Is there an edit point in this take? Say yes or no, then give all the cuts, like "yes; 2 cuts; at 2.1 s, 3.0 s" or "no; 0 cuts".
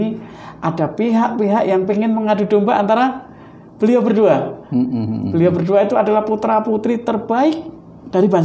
no; 0 cuts